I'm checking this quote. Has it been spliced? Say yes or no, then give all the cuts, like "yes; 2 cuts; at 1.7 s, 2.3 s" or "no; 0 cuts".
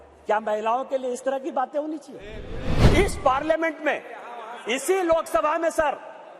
yes; 1 cut; at 2.7 s